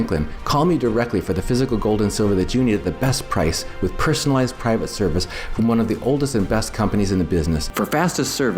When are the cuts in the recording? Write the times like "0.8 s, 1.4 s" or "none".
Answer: 7.7 s